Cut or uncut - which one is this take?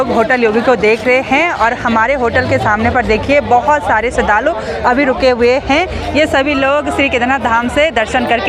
uncut